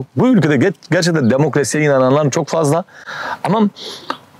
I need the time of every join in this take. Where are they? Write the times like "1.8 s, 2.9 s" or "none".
none